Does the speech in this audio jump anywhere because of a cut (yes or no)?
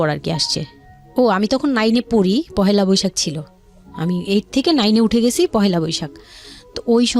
no